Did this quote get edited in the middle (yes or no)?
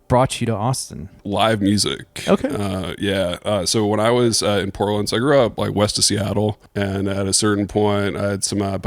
yes